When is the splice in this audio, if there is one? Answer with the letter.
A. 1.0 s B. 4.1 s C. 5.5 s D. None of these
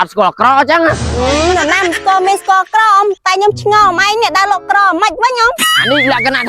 C